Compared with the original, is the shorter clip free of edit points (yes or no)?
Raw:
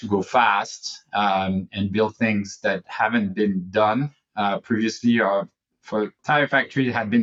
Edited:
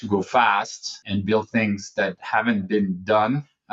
no